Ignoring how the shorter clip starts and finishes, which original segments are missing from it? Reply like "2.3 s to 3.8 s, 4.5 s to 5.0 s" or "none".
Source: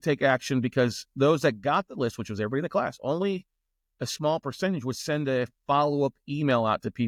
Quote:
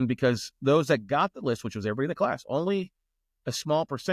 none

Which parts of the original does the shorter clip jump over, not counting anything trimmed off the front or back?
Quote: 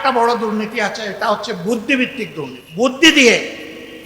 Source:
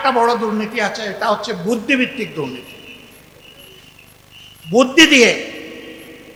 3.0 s to 4.9 s

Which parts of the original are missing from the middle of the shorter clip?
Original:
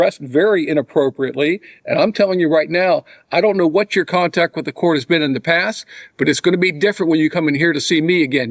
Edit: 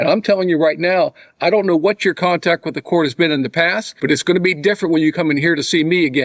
5.8 s to 6.0 s

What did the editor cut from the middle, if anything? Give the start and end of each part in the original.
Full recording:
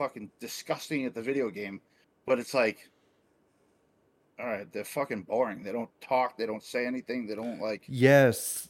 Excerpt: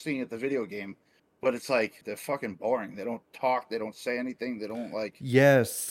2.8 s to 4.7 s

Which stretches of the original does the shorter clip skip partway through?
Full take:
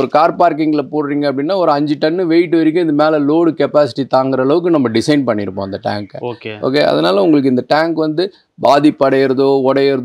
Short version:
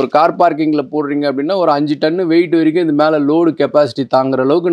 none

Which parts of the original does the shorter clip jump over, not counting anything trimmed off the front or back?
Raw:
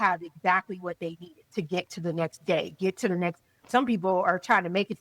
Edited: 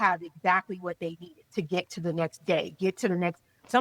none

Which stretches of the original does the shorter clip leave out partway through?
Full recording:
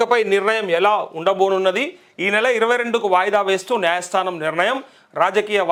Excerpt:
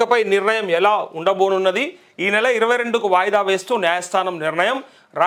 none

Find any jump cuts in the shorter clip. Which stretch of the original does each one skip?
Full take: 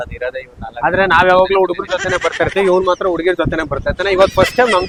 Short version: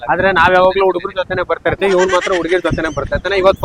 none

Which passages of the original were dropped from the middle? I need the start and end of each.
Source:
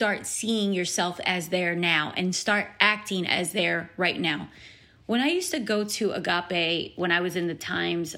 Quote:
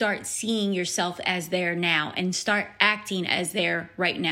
none

